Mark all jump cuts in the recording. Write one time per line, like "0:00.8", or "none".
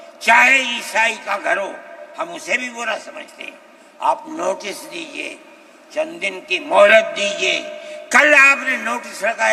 none